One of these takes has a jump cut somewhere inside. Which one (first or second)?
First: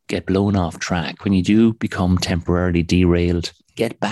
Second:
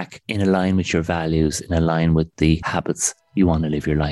second